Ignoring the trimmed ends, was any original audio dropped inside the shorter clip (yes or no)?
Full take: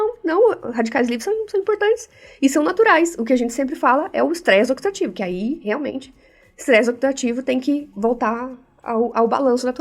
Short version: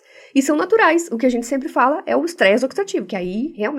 no